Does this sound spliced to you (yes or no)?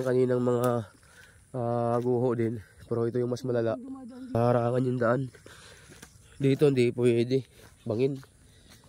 yes